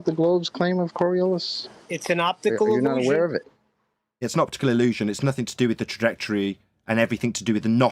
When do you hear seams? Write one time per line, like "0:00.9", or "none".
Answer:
none